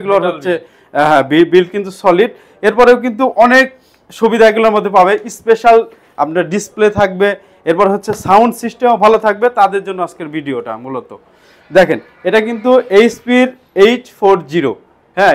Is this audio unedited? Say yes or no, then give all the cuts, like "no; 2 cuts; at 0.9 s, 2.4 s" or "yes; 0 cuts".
yes; 0 cuts